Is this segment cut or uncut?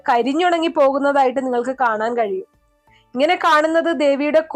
uncut